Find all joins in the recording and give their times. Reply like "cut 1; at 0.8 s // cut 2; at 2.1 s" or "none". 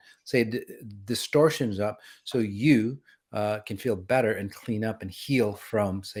none